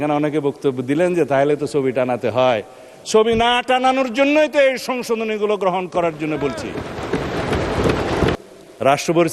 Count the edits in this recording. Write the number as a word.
one